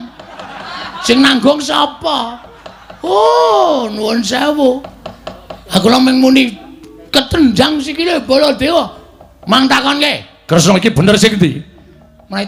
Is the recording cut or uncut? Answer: uncut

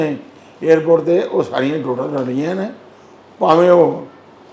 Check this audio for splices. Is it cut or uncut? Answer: uncut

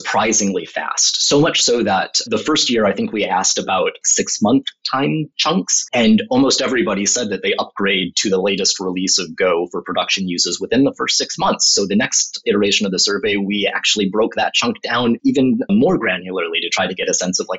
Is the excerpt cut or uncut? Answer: cut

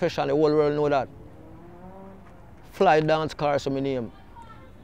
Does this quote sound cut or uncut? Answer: uncut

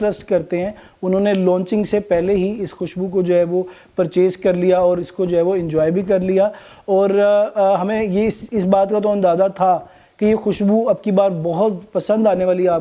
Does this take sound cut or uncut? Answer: uncut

